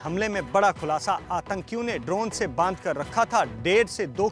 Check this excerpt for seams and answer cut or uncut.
uncut